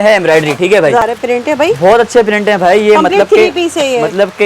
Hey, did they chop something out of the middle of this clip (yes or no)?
yes